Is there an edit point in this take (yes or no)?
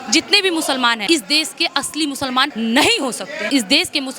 yes